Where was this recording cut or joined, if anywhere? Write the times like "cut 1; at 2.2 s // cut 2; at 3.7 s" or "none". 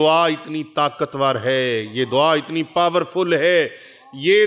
none